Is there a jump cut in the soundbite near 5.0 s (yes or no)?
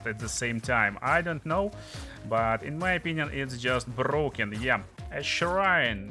yes